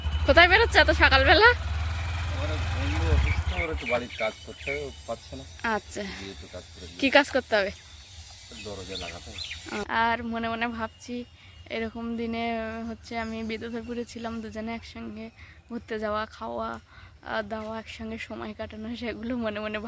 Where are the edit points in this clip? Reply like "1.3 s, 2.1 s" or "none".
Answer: 9.8 s

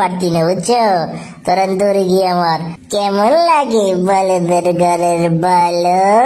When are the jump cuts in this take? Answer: 2.7 s

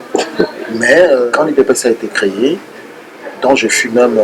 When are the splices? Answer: 1.3 s

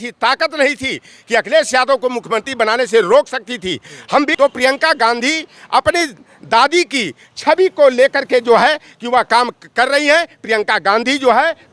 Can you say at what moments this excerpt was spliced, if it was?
4.3 s

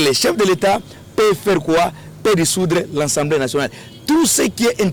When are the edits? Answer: none

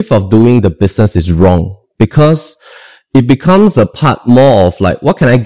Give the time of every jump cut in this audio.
none

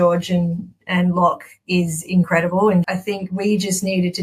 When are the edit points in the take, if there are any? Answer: 2.9 s

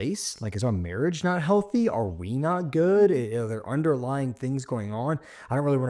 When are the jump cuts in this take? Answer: none

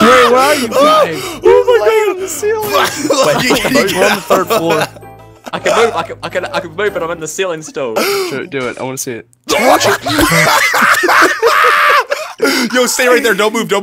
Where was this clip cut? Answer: 8.0 s

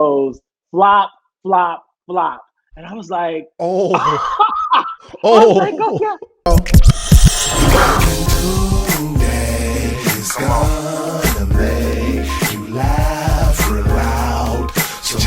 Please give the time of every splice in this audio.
6.5 s

